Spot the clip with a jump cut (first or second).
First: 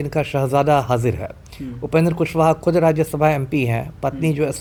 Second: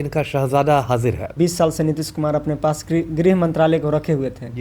second